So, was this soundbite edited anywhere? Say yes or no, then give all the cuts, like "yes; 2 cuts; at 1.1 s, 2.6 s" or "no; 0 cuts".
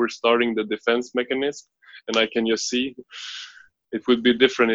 yes; 1 cut; at 3.1 s